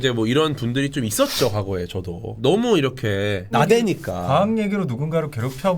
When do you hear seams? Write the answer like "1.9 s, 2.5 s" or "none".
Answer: 2.4 s